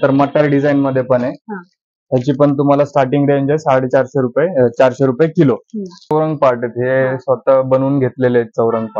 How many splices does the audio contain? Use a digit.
1